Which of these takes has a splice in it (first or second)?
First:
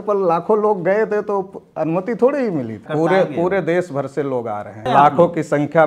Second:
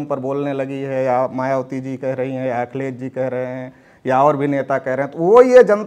first